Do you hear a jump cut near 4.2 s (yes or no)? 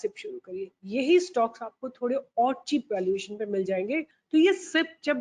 yes